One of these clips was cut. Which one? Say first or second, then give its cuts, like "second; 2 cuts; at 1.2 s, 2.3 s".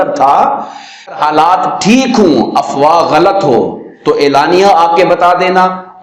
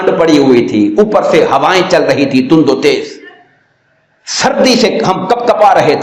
first; 1 cut; at 1.2 s